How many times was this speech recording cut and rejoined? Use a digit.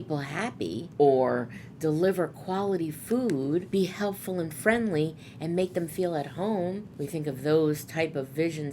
3